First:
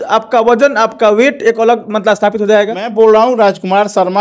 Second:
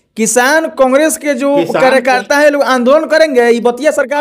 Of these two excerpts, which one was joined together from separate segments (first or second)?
first